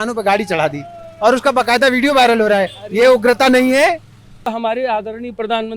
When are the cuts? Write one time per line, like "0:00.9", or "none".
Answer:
0:04.5